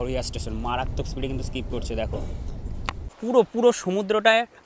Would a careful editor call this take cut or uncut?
cut